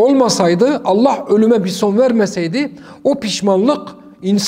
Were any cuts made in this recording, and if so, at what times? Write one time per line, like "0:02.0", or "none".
none